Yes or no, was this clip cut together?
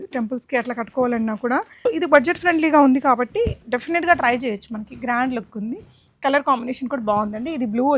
yes